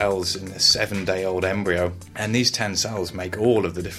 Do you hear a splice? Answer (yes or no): yes